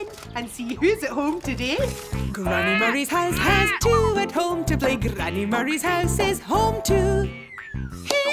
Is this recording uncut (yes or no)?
no